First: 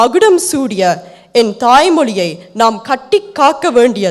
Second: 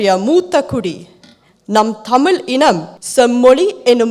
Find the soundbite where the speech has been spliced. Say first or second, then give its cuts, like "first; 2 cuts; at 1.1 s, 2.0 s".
second; 1 cut; at 2.9 s